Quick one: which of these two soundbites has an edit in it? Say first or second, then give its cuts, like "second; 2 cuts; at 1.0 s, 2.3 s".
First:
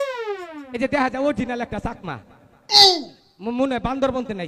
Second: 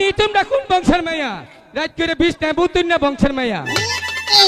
second; 1 cut; at 1.4 s